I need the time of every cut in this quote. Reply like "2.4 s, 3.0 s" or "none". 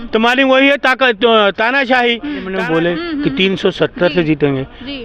2.5 s

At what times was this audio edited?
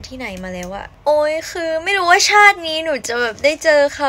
1.0 s

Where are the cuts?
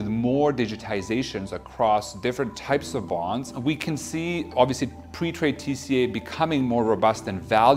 3.5 s

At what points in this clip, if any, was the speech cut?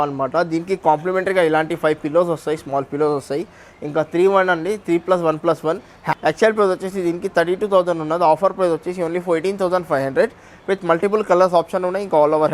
6.1 s

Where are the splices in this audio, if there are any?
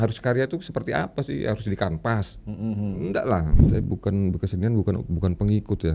3.6 s

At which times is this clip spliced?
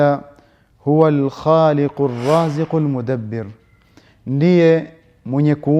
none

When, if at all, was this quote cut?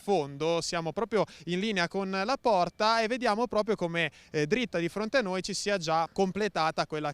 1.8 s

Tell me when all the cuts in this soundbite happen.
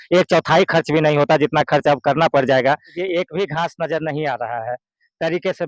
2.9 s

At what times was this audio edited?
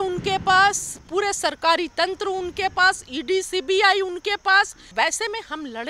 4.9 s

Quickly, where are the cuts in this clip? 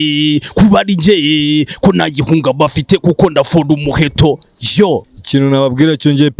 5.0 s

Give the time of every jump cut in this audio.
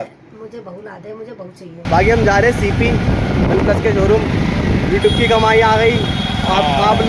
1.8 s

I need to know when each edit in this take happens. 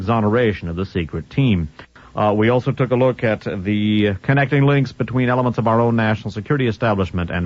4.7 s

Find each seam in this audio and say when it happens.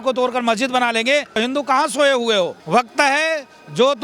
1.4 s

